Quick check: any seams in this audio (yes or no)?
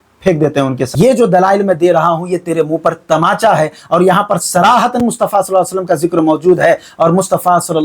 yes